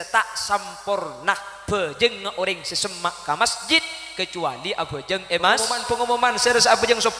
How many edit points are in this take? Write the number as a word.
one